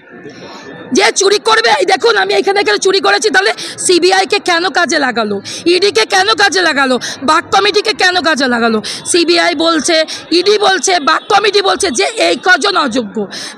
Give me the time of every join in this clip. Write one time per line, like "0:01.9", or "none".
none